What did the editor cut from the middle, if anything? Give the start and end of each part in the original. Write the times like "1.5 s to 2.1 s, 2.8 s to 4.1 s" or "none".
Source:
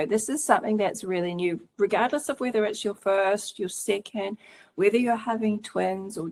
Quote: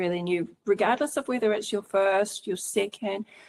none